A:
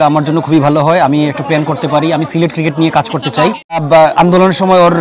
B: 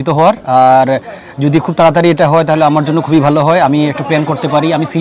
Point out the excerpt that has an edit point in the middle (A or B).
A